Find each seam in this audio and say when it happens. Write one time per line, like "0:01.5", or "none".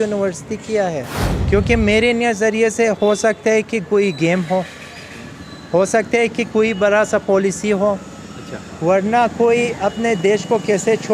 0:01.2